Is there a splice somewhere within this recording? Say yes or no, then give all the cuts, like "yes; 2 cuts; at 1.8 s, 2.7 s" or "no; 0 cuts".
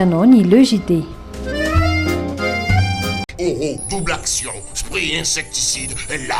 no; 0 cuts